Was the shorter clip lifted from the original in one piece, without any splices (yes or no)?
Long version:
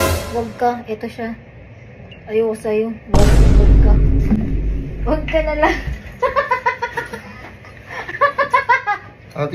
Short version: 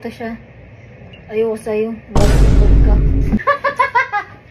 no